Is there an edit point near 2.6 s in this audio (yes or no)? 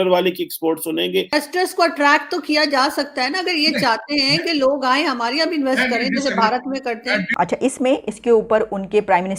no